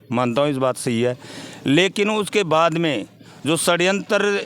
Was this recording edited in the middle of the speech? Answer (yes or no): no